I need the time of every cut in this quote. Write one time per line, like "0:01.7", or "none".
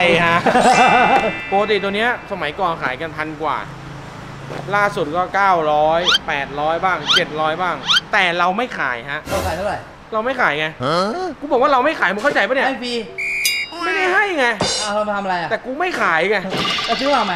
0:01.4
0:09.9
0:11.4